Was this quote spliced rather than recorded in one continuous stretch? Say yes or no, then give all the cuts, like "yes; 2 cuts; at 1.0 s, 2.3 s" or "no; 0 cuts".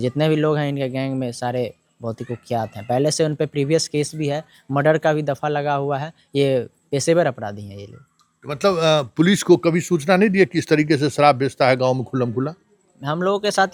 no; 0 cuts